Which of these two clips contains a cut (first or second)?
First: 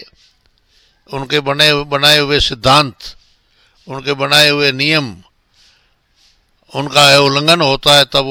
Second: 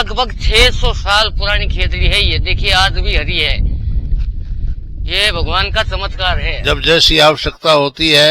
second